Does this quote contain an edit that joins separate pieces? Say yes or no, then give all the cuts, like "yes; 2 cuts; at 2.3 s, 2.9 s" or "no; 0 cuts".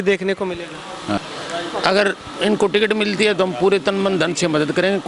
yes; 1 cut; at 1.2 s